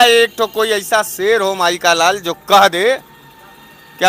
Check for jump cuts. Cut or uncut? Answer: uncut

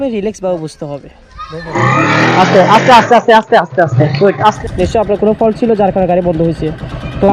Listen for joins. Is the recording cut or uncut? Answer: cut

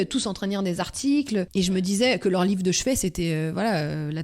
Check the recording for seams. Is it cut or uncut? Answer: cut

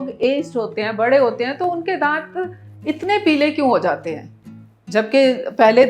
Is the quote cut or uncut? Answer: uncut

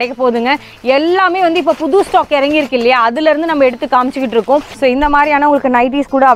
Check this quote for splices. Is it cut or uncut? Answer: cut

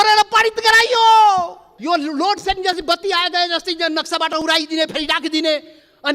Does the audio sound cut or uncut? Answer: cut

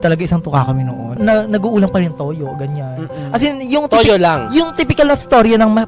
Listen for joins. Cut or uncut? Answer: cut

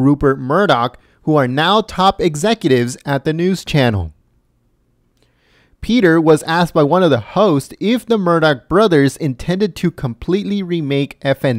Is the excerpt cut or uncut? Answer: cut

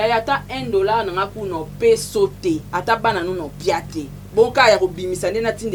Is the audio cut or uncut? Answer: uncut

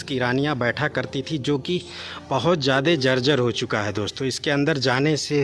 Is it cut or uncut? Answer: uncut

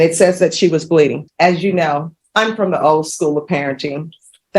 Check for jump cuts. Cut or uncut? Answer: cut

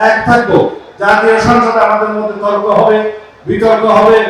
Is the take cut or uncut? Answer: uncut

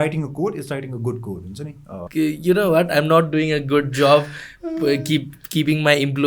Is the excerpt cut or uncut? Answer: cut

